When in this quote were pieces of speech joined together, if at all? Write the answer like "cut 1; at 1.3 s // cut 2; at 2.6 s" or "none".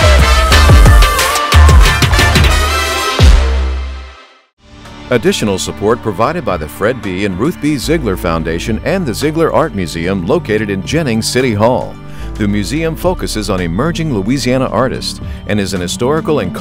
cut 1; at 4.9 s